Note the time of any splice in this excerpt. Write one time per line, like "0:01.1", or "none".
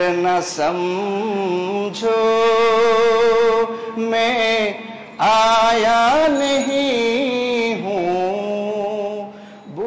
none